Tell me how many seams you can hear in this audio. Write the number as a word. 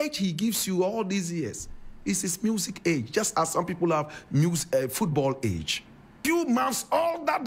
one